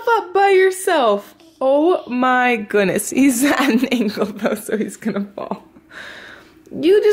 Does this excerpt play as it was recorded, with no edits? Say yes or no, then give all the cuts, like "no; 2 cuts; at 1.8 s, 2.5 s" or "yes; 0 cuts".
yes; 0 cuts